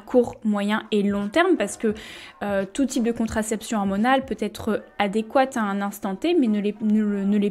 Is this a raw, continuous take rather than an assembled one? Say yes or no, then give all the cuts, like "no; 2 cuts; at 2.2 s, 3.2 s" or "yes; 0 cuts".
yes; 0 cuts